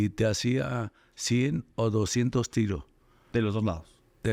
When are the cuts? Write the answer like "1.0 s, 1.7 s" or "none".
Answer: none